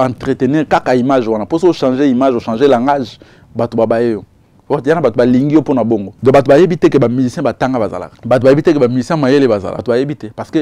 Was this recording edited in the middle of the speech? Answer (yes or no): yes